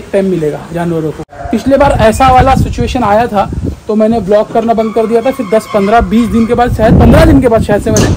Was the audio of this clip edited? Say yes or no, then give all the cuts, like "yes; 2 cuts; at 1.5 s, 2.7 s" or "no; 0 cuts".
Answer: yes; 1 cut; at 1.3 s